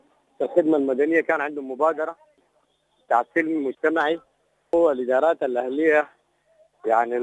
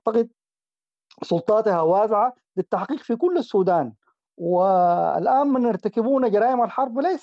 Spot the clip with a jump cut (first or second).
first